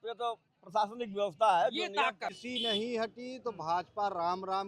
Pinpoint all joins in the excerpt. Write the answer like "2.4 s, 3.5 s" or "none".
2.4 s